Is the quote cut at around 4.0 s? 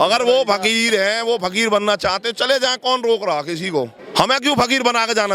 yes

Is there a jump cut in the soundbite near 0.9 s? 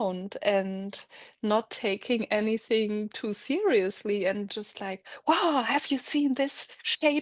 no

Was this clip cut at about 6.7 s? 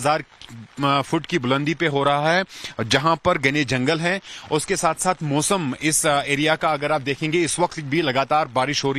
no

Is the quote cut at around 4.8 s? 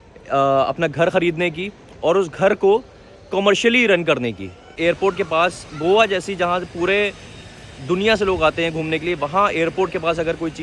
yes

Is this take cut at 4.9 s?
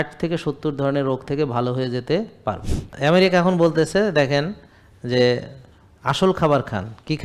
no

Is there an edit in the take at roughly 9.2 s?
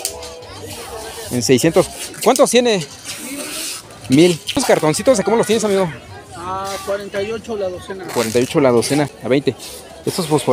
yes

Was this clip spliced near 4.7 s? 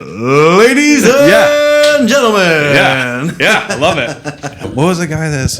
yes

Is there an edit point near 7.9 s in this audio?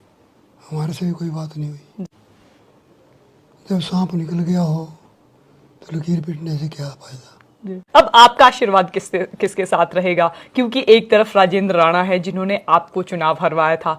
yes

